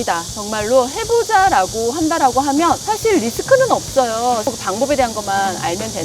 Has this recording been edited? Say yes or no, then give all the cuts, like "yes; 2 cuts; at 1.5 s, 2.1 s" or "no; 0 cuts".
yes; 1 cut; at 4.5 s